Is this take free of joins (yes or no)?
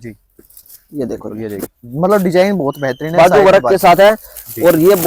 no